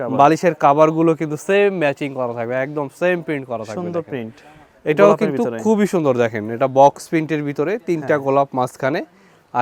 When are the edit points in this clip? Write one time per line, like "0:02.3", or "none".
none